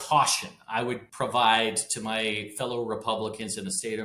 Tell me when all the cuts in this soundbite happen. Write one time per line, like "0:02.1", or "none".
0:01.1